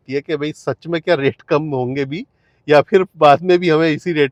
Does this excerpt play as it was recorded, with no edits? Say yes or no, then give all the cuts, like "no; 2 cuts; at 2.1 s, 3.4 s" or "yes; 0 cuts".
yes; 0 cuts